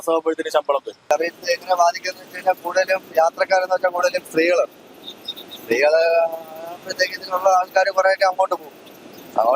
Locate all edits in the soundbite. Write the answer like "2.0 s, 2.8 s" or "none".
0.9 s